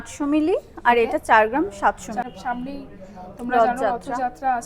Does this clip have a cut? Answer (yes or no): yes